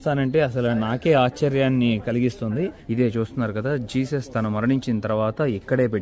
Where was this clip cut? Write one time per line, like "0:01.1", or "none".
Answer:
0:02.8